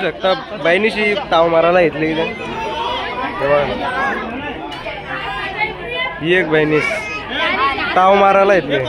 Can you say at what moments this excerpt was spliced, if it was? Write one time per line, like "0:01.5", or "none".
none